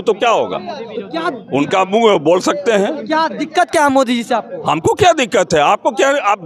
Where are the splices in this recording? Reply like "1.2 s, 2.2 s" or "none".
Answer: none